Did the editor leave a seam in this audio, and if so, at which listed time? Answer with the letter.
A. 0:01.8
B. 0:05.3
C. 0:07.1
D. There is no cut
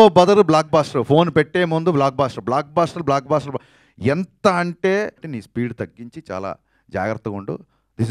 B